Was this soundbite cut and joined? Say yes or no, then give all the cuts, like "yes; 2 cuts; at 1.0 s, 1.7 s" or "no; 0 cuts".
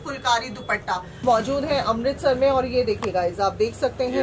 yes; 1 cut; at 1.2 s